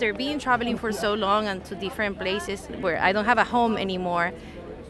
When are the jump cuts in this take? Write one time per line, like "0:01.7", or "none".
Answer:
0:02.7